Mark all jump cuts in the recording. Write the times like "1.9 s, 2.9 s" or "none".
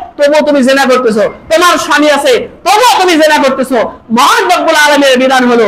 none